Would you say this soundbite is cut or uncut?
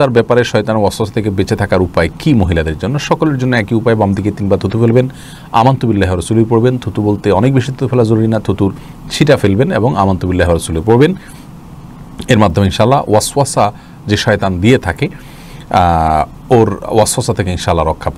uncut